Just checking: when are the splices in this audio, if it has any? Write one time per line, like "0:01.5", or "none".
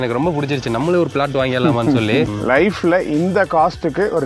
0:02.3